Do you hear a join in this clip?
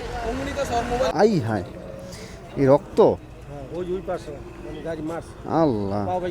yes; 1 cut; at 1.1 s

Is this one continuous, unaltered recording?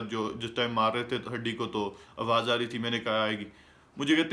yes; 0 cuts

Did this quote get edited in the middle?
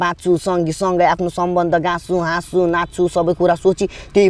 no; 0 cuts

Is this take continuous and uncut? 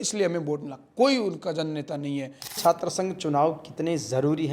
no; 1 cut; at 2.6 s

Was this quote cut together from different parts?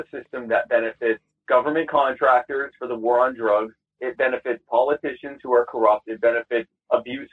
yes; 1 cut; at 1.3 s

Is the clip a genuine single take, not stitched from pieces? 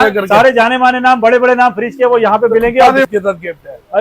no; 1 cut; at 3.1 s

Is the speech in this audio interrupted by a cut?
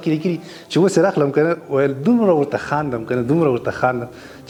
no; 0 cuts

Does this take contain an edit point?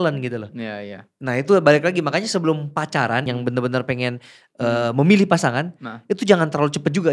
yes; 1 cut; at 3.2 s

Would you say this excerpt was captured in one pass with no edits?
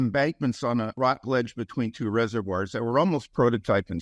no; 1 cut; at 1.0 s

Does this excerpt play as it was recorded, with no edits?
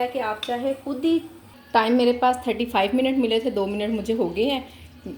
no; 1 cut; at 1.5 s

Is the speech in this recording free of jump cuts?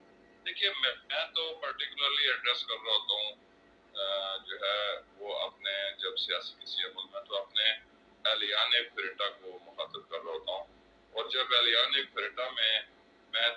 yes; 0 cuts

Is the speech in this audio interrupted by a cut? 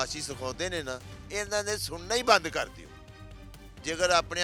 no; 0 cuts

